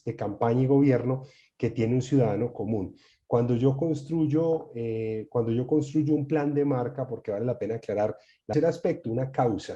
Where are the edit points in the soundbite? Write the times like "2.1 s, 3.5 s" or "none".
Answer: 8.5 s